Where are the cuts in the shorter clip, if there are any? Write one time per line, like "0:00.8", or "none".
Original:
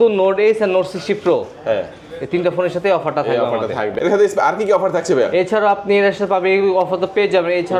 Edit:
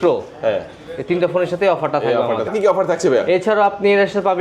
0:02.5